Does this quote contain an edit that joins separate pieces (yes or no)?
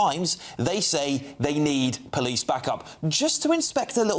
no